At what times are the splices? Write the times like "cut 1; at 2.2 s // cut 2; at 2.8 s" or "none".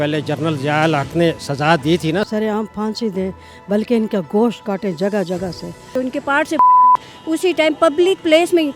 cut 1; at 2.3 s // cut 2; at 5.9 s